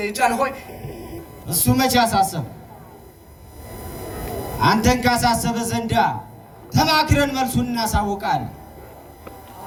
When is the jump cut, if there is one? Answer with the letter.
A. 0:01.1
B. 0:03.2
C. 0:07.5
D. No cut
D